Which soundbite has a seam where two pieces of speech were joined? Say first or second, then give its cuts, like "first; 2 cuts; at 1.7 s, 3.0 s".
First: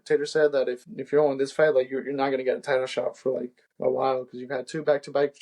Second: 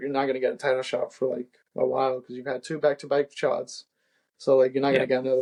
first; 1 cut; at 0.9 s